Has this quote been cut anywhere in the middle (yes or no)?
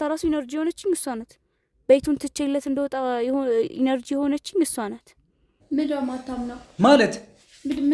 yes